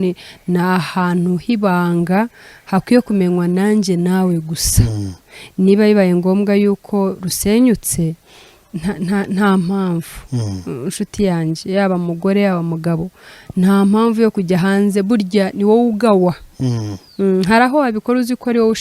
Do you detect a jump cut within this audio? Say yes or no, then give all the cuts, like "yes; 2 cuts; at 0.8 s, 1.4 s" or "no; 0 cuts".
no; 0 cuts